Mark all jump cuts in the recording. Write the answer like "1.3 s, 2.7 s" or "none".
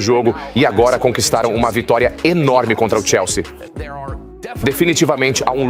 none

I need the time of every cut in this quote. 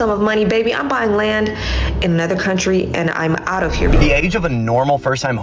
4.0 s

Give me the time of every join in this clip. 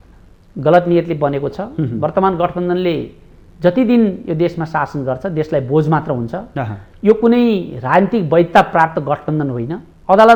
none

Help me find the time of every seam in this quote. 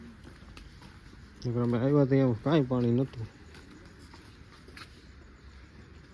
none

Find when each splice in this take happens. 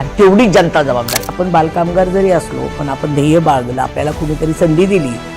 1.3 s

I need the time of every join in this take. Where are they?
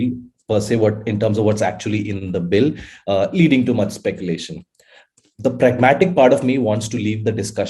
none

